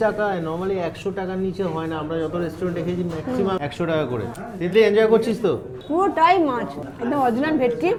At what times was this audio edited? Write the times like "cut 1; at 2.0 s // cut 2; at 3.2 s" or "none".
none